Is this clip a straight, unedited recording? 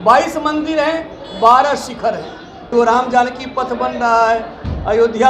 no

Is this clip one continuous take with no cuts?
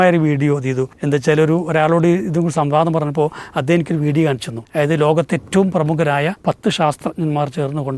no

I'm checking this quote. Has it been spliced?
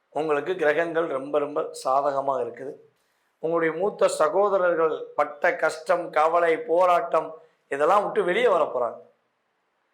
no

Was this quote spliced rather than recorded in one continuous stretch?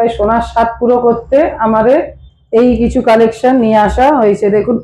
no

